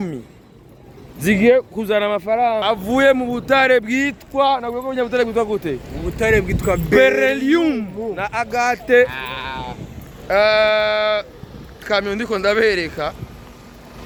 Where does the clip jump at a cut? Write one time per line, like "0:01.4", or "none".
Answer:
none